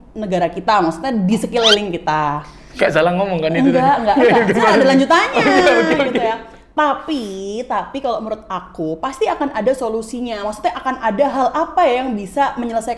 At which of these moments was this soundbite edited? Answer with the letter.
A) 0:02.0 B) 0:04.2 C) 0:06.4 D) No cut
D